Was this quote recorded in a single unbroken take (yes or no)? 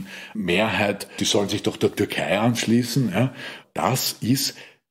no